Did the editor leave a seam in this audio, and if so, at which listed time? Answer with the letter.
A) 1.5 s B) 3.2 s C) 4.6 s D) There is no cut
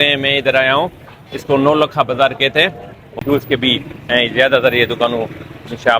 B